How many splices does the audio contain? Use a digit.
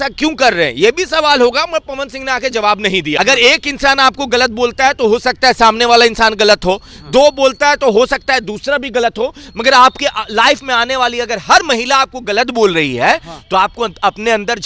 1